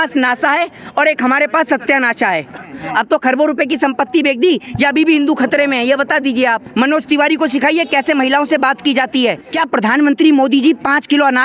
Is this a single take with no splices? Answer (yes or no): no